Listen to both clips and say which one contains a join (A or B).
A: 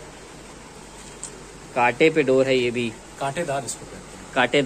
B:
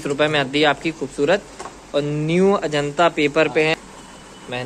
B